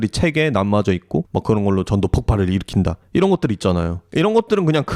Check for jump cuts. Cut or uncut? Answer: cut